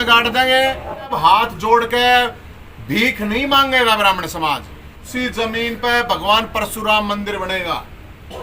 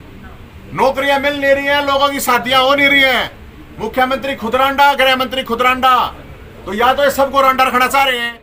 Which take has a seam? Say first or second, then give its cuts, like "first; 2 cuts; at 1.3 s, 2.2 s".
first; 2 cuts; at 1.1 s, 5.0 s